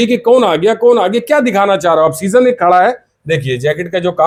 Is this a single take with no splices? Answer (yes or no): yes